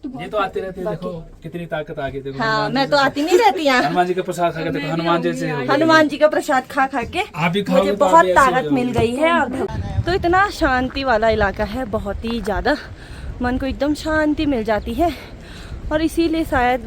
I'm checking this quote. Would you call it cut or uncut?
cut